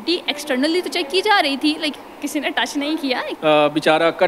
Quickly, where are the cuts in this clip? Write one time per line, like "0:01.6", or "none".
0:03.3